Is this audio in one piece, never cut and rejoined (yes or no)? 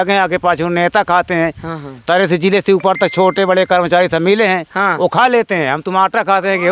yes